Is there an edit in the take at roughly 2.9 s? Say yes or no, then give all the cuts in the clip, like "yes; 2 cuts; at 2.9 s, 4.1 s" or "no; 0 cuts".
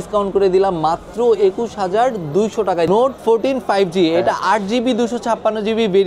yes; 1 cut; at 2.9 s